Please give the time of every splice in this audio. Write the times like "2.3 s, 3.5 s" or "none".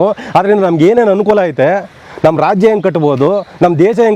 none